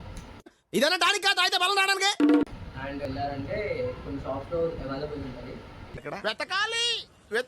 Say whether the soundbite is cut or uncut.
cut